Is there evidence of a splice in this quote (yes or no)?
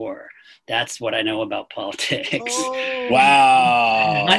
no